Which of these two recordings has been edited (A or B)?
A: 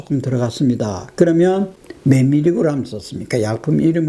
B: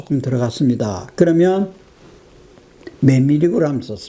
A